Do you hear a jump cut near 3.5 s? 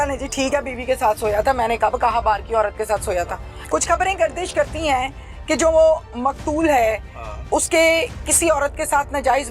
yes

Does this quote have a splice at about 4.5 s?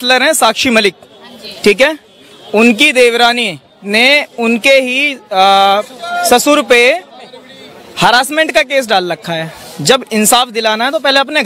no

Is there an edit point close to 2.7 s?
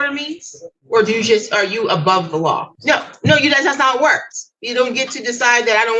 yes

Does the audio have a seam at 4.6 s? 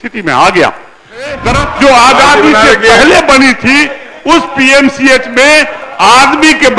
no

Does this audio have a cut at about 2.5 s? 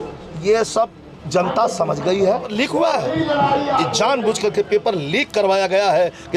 yes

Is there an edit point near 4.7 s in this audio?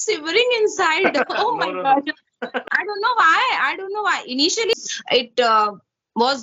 yes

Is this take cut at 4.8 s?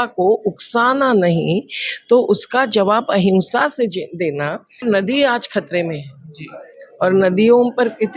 yes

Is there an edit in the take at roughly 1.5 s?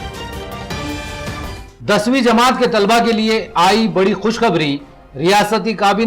yes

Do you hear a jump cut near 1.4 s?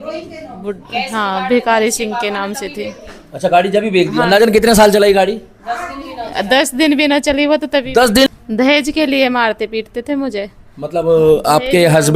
no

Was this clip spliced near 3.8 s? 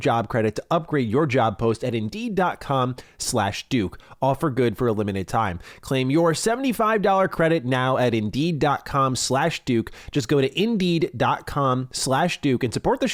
no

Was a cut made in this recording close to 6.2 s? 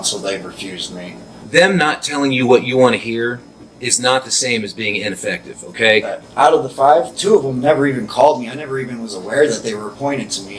yes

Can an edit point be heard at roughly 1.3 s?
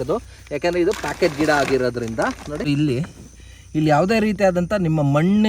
no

